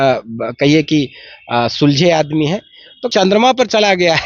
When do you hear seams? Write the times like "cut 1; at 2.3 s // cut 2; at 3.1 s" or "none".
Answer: cut 1; at 3.0 s